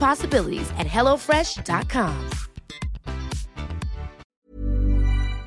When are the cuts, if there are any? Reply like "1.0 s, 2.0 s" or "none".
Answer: 4.4 s